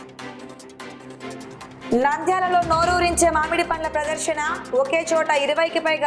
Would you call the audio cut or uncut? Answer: cut